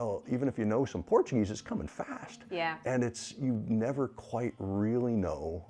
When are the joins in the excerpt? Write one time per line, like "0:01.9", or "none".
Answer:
none